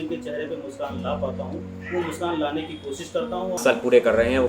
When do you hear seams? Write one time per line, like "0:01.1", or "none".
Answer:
0:03.6